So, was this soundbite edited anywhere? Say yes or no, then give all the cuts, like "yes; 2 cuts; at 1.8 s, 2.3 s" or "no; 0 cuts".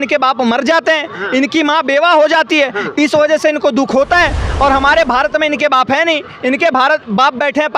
no; 0 cuts